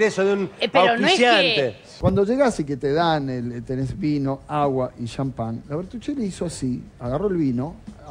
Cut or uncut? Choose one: cut